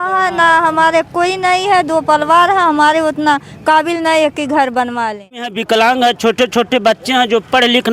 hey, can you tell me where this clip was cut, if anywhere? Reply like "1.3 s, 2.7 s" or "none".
5.6 s